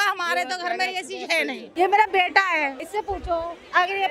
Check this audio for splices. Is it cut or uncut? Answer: cut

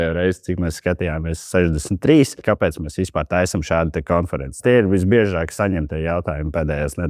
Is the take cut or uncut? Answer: cut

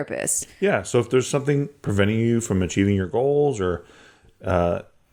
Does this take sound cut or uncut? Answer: uncut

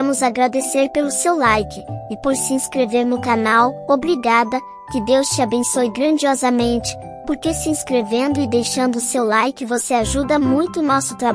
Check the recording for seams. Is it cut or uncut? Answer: uncut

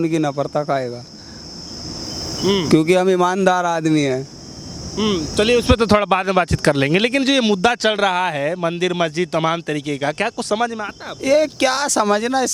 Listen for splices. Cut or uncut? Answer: uncut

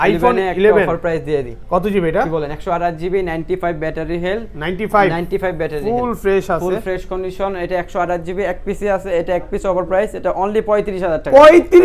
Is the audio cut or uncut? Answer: uncut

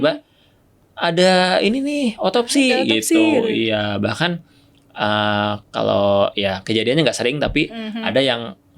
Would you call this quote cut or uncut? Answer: uncut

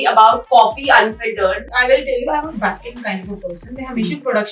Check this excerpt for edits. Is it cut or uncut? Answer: cut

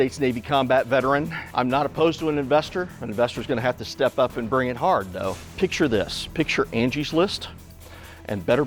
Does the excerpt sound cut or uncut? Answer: cut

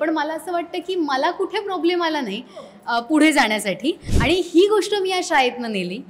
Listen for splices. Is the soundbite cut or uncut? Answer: cut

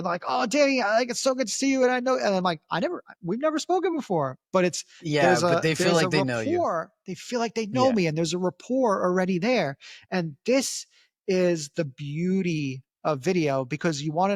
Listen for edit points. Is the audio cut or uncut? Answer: uncut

